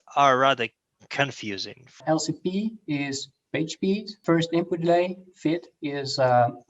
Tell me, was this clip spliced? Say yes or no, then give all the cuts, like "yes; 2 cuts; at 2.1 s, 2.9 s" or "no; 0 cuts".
yes; 2 cuts; at 2.0 s, 4.2 s